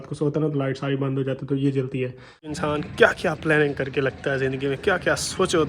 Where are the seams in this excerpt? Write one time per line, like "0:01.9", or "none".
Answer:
0:02.6